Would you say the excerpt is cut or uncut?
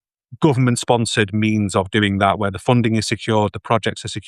uncut